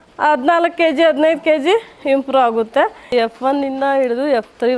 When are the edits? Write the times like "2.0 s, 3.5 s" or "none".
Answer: 3.1 s